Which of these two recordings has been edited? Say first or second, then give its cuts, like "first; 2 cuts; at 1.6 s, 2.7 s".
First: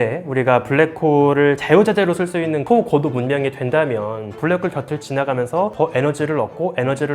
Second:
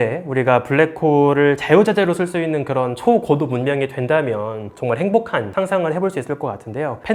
first; 2 cuts; at 2.6 s, 4.3 s